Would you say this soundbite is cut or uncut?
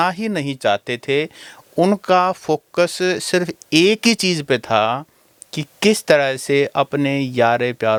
uncut